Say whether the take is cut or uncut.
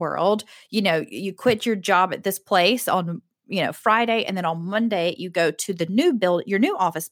uncut